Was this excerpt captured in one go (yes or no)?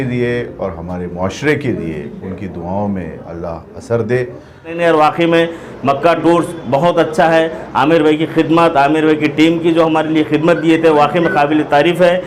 no